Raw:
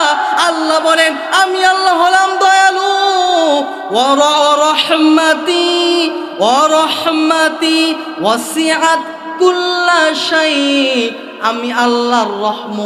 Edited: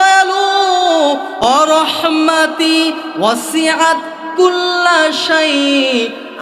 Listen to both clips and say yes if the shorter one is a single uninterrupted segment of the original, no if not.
no